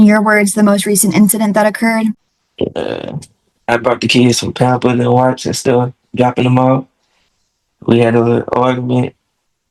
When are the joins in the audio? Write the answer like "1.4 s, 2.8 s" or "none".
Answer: 2.4 s